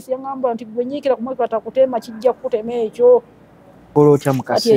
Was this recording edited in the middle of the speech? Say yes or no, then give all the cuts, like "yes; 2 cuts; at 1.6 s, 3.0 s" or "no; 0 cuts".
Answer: yes; 1 cut; at 3.8 s